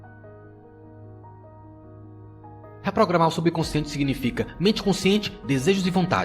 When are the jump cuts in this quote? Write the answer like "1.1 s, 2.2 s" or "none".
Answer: 0.9 s, 2.8 s